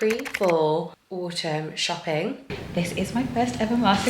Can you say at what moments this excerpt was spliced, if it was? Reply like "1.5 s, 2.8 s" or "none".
2.5 s